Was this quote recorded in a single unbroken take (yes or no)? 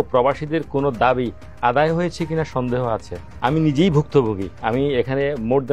no